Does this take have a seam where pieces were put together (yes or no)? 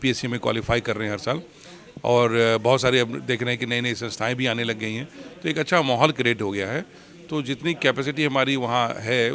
no